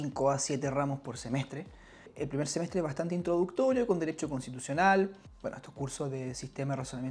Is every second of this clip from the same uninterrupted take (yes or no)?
no